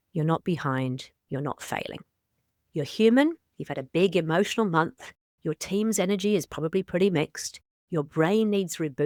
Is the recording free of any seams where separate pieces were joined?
yes; 0 cuts

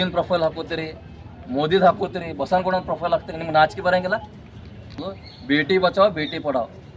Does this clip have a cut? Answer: yes; 1 cut; at 5.0 s

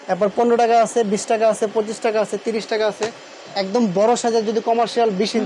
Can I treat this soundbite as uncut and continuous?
yes; 0 cuts

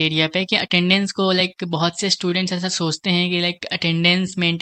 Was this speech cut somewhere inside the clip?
no; 0 cuts

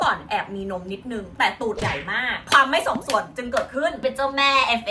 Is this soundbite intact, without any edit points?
no; 2 cuts; at 2.5 s, 4.0 s

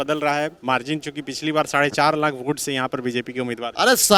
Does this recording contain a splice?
no; 0 cuts

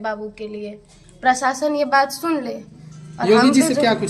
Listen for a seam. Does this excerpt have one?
no; 0 cuts

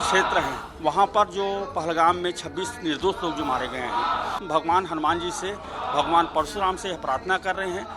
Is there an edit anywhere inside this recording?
yes; 1 cut; at 4.3 s

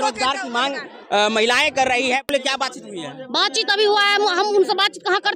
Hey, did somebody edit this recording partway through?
yes; 1 cut; at 2.2 s

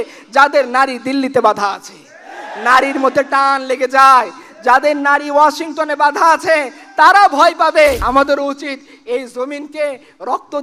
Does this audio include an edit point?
yes; 1 cut; at 8.0 s

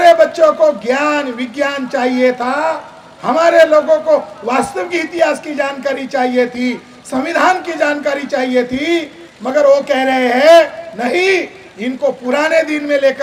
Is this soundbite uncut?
yes; 0 cuts

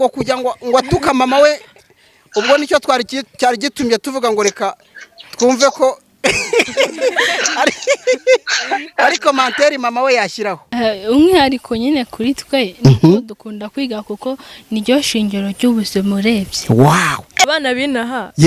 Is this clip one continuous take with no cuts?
no; 2 cuts; at 10.6 s, 17.4 s

